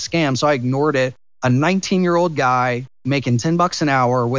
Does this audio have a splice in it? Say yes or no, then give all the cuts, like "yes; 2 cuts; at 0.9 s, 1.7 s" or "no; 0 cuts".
yes; 1 cut; at 1.2 s